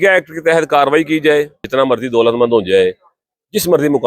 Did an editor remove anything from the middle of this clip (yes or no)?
yes